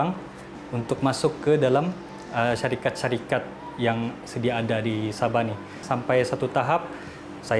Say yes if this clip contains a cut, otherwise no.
yes